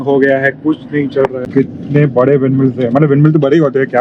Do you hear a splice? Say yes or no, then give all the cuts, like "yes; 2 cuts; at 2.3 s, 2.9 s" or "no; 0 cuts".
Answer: yes; 1 cut; at 1.4 s